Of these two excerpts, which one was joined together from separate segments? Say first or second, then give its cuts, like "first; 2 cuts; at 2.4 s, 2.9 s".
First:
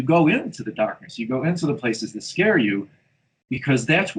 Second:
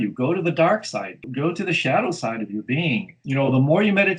second; 1 cut; at 3.1 s